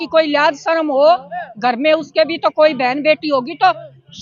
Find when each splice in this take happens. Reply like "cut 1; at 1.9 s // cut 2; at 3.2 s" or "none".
none